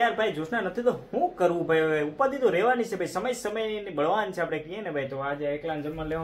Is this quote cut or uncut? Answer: uncut